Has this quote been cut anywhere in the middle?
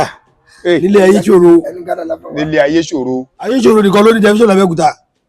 yes; 1 cut; at 3.5 s

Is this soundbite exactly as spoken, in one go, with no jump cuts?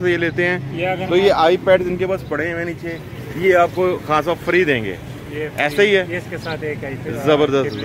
yes; 0 cuts

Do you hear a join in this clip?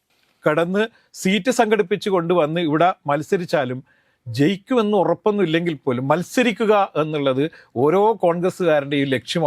no; 0 cuts

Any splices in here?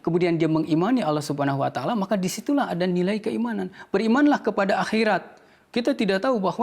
no; 0 cuts

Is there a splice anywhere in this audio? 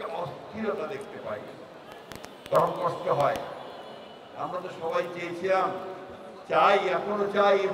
no; 0 cuts

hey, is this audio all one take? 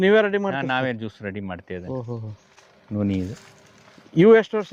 yes; 0 cuts

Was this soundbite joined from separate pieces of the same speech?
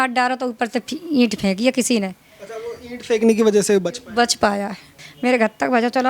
yes; 1 cut; at 4.8 s

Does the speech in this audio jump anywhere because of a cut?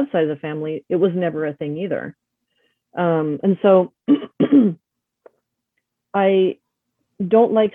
no; 0 cuts

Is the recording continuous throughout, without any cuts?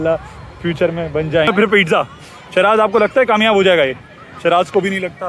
no; 1 cut; at 1.5 s

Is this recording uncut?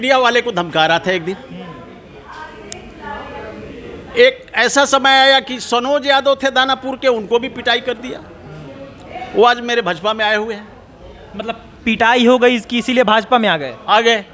yes; 0 cuts

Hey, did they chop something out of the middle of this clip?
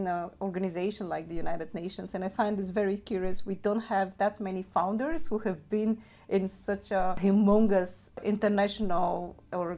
yes; 2 cuts; at 7.2 s, 8.2 s

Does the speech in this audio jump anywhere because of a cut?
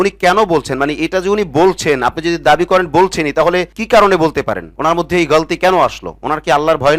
no; 0 cuts

